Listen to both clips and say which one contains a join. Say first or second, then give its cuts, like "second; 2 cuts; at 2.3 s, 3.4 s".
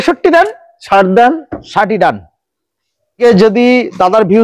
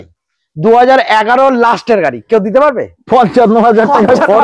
first; 1 cut; at 3.2 s